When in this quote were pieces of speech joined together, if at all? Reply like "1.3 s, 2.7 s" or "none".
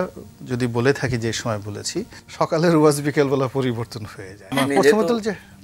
2.2 s, 4.5 s